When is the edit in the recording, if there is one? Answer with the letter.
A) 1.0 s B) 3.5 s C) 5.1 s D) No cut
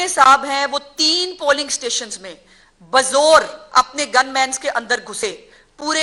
D